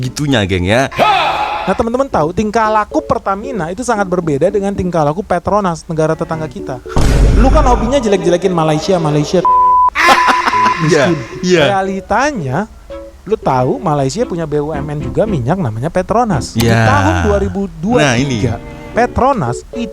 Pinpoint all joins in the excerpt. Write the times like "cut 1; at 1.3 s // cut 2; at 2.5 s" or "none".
cut 1; at 1.6 s